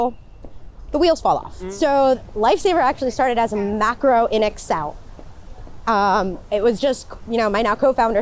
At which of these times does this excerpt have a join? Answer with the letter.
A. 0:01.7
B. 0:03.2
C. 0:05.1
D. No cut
A